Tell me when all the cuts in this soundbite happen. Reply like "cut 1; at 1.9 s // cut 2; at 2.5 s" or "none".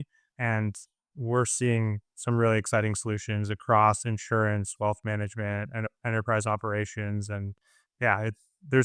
none

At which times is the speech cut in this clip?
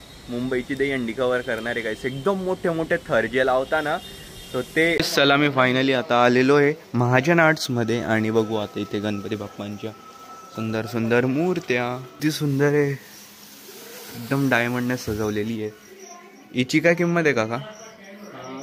cut 1; at 5.0 s // cut 2; at 12.1 s

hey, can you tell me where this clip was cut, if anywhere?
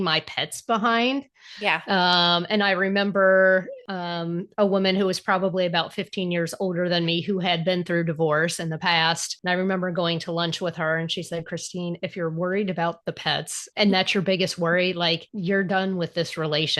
cut 1; at 3.8 s // cut 2; at 9.3 s // cut 3; at 13.6 s // cut 4; at 15.3 s

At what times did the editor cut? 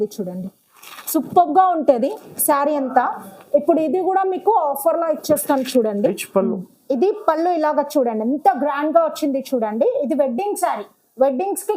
cut 1; at 6.1 s

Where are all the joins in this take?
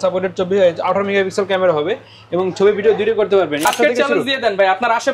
cut 1; at 3.6 s

